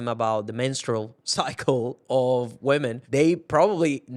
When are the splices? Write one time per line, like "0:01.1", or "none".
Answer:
0:03.0

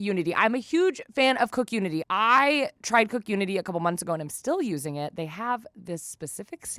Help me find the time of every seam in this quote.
0:02.0

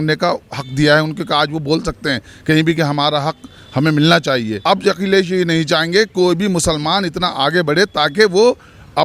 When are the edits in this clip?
0:04.5

